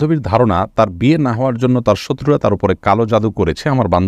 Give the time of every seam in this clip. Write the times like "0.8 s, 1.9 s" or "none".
none